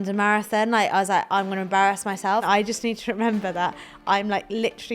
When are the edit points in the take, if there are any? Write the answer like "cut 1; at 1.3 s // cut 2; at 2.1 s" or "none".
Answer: cut 1; at 2.4 s